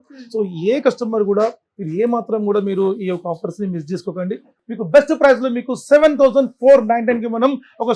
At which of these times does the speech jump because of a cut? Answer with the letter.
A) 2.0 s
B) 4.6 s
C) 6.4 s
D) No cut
B